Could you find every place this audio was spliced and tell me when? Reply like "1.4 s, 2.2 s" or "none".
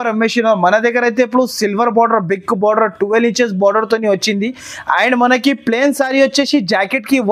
none